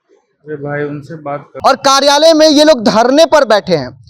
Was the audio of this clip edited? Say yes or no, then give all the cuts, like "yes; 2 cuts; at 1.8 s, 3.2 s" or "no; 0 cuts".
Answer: yes; 1 cut; at 1.5 s